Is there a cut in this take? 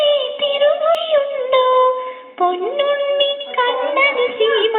yes; 1 cut; at 1.0 s

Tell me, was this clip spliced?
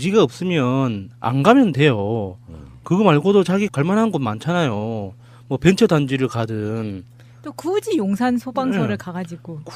no; 0 cuts

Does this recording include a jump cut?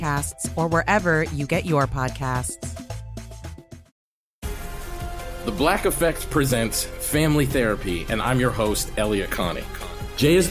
yes; 1 cut; at 3.9 s

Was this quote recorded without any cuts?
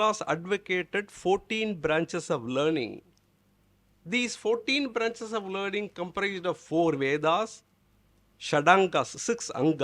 yes; 0 cuts

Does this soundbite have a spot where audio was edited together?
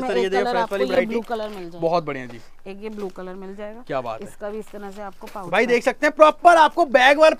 no; 0 cuts

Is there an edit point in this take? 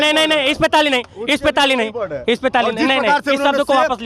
no; 0 cuts

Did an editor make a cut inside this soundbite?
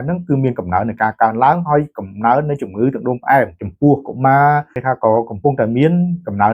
yes; 2 cuts; at 3.6 s, 4.8 s

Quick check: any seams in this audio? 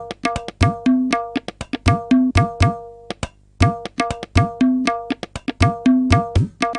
no; 0 cuts

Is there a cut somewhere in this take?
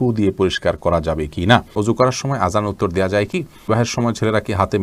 yes; 2 cuts; at 1.7 s, 3.7 s

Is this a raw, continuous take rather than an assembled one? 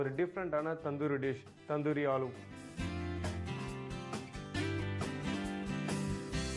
no; 1 cut; at 2.4 s

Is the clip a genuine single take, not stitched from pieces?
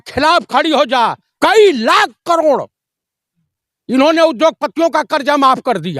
no; 1 cut; at 1.3 s

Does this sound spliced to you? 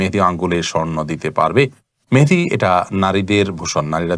no; 0 cuts

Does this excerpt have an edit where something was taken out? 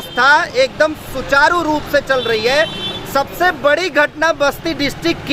no; 0 cuts

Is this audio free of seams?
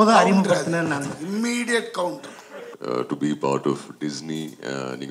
no; 1 cut; at 2.7 s

